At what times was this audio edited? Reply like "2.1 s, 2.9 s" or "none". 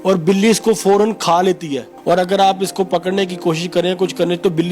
1.9 s